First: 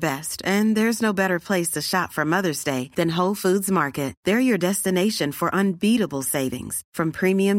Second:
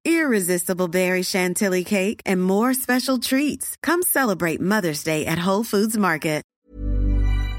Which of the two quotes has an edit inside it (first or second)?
second